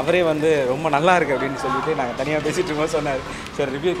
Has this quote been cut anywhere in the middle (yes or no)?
no